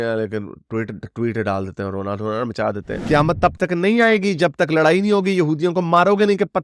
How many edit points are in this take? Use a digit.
1